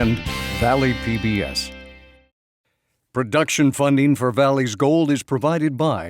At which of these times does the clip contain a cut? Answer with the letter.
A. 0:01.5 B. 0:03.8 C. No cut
A